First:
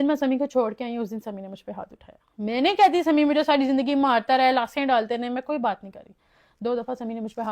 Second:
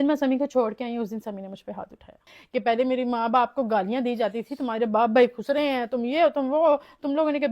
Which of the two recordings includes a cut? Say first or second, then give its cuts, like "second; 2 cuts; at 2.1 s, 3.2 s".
second; 1 cut; at 2.2 s